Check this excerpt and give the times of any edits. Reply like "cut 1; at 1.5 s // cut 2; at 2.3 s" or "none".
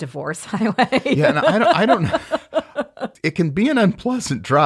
cut 1; at 3.1 s